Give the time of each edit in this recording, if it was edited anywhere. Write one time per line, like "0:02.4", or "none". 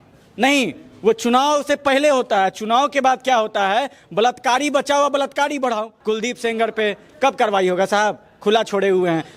0:05.9